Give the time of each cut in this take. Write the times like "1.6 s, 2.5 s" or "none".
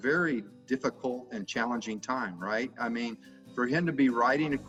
none